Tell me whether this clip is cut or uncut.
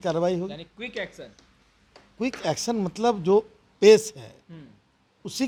uncut